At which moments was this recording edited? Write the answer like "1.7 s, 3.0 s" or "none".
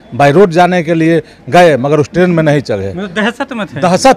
none